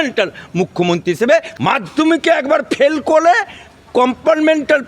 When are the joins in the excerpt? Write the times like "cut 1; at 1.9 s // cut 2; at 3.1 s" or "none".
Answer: cut 1; at 1.5 s